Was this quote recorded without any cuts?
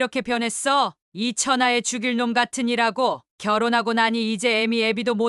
yes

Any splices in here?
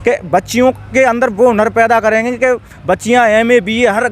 no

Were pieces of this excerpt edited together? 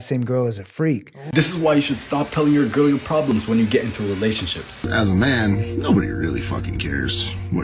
yes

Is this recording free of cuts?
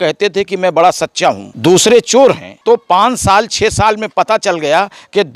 no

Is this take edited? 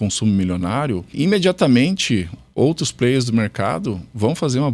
yes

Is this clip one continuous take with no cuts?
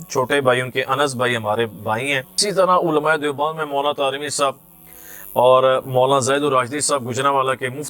no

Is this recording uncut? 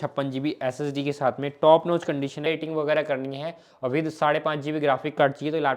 no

